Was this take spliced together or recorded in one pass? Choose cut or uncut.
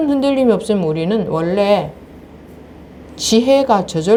uncut